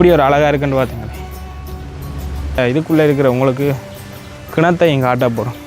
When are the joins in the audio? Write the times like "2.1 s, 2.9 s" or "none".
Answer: 2.6 s